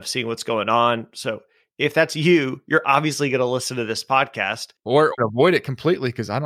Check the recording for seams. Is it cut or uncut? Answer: uncut